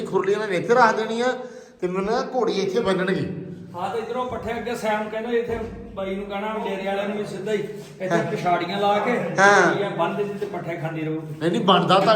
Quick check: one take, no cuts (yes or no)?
yes